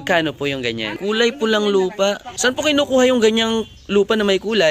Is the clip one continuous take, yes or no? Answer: no